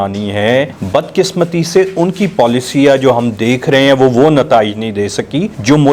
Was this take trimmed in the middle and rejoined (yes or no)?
no